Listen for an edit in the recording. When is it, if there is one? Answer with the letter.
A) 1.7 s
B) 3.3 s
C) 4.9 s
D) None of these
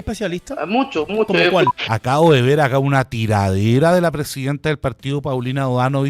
A